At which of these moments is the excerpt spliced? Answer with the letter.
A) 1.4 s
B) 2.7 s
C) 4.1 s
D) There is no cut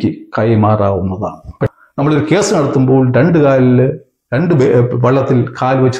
A